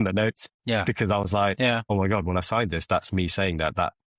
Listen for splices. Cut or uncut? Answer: uncut